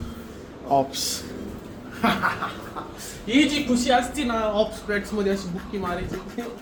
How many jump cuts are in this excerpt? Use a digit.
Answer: 0